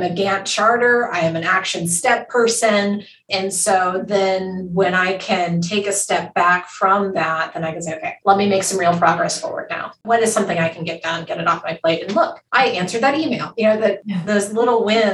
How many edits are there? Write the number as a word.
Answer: three